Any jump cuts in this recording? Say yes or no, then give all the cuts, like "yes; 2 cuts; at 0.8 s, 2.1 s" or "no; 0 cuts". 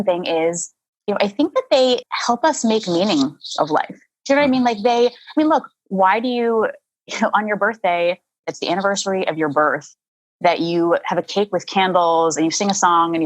yes; 3 cuts; at 2.1 s, 8.5 s, 11.3 s